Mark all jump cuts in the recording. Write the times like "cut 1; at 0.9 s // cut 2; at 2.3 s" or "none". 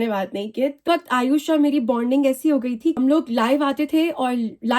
cut 1; at 0.8 s // cut 2; at 3.0 s